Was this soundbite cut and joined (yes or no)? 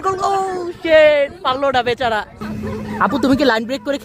yes